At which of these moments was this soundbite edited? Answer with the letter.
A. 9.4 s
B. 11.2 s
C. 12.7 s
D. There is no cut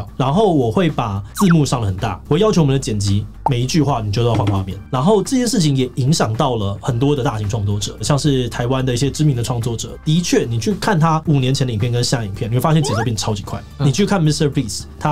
B